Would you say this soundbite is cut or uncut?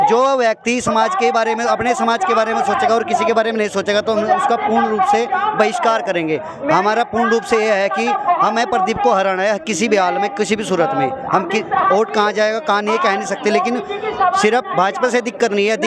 uncut